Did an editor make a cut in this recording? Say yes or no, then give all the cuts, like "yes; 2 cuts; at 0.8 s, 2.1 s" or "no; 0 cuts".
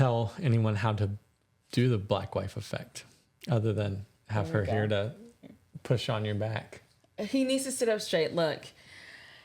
no; 0 cuts